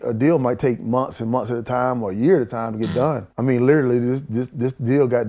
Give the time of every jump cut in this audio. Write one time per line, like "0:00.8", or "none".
0:03.3

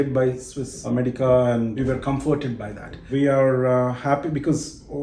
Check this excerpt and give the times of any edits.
0:00.9
0:01.8
0:03.1

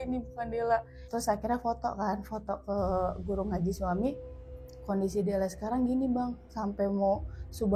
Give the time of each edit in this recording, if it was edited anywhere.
0:01.0

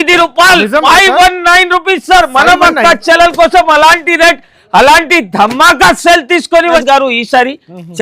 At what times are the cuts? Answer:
0:06.8

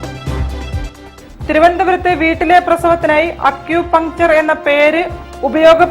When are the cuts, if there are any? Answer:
0:01.1

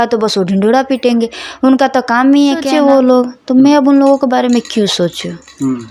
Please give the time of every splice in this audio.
0:02.7

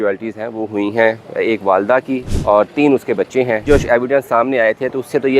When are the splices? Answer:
0:02.3
0:03.7

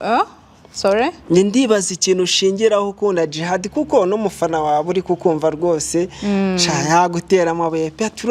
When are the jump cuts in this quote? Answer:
none

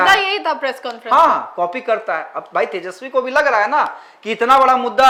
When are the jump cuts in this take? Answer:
none

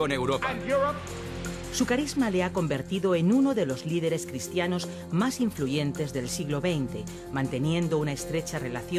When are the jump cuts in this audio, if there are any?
0:06.6

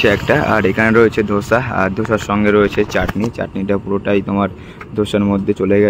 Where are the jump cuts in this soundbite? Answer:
none

